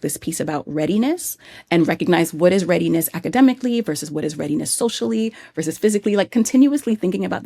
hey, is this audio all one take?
yes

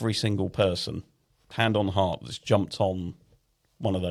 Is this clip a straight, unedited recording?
yes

